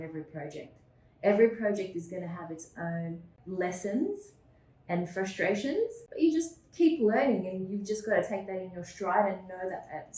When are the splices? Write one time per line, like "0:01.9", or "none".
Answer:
0:03.3
0:06.0

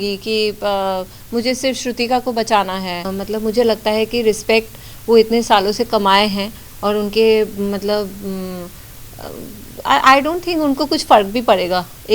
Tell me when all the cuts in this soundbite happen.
0:03.1

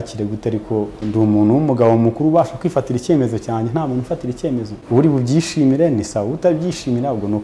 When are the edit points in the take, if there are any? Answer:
0:01.0
0:04.8

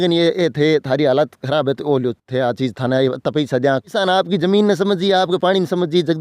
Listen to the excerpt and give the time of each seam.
0:03.9

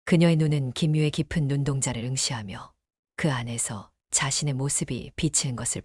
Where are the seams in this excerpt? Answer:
none

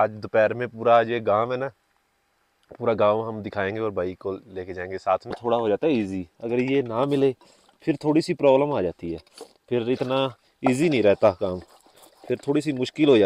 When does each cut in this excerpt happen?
0:05.3

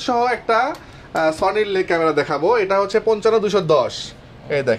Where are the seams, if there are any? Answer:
none

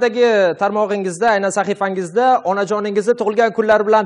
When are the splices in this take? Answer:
none

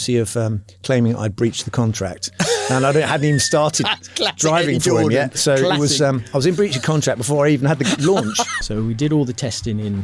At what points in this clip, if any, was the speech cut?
0:08.6

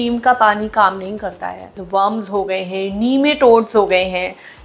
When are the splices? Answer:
0:01.8

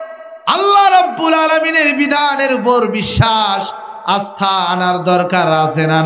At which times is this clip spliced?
none

